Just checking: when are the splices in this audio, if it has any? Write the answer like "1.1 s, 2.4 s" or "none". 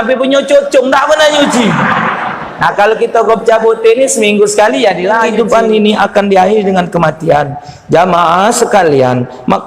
5.3 s